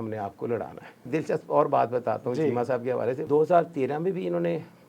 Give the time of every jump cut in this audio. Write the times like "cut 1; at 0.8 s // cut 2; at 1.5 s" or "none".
cut 1; at 1.1 s // cut 2; at 3.2 s